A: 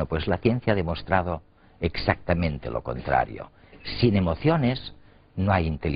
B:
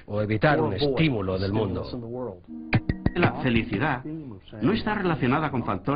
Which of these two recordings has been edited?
A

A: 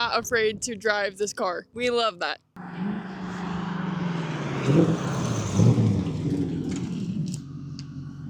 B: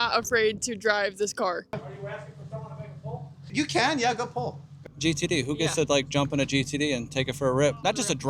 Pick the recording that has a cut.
B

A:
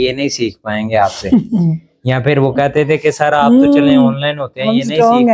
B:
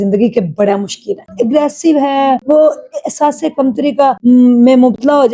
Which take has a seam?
B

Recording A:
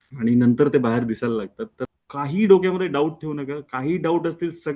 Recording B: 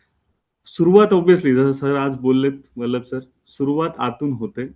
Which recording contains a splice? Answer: A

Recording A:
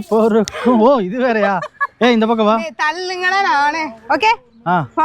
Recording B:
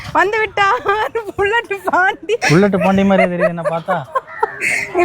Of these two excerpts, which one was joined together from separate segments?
B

